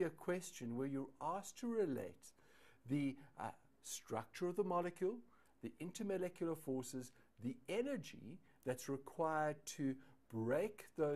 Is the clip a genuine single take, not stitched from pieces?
no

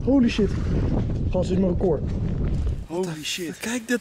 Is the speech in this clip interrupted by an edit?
yes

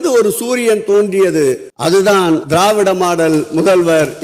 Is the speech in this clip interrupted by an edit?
yes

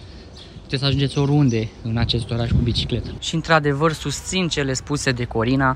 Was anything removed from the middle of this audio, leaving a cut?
yes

